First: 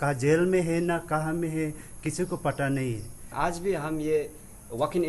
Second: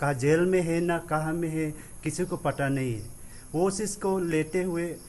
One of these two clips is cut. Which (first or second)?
first